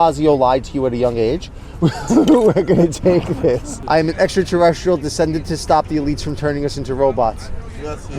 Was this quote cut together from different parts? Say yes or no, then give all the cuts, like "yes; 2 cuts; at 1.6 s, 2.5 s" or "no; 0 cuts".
yes; 1 cut; at 3.7 s